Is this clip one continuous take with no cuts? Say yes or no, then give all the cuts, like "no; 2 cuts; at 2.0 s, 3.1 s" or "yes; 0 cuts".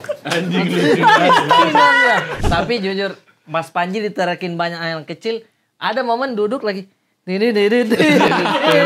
no; 1 cut; at 2.4 s